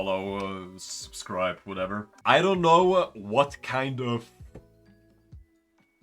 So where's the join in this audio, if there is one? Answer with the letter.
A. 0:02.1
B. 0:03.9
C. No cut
A